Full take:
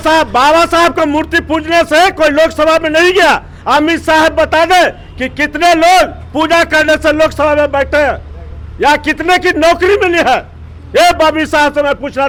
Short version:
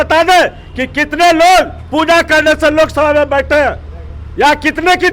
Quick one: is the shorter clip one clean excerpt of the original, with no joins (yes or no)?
yes